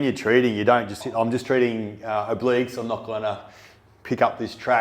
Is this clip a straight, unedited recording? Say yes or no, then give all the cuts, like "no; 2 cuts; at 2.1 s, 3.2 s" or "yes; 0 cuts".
no; 1 cut; at 1.0 s